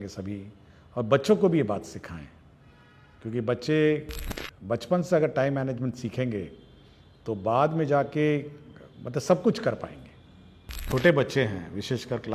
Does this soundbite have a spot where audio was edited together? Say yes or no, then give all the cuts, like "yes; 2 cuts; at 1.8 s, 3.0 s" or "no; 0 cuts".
yes; 1 cut; at 10.8 s